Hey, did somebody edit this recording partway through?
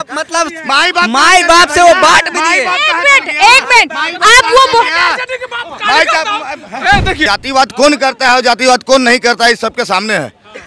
yes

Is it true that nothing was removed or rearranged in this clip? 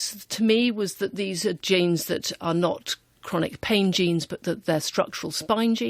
yes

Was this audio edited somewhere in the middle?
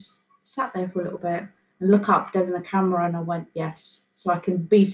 no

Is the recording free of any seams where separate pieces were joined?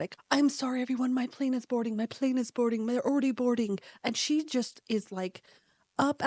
yes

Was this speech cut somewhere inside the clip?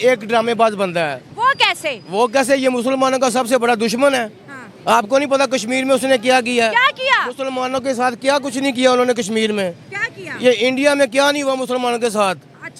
no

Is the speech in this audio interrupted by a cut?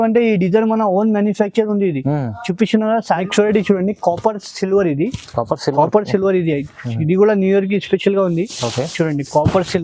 yes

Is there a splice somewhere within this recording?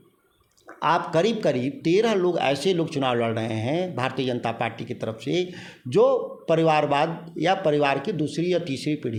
no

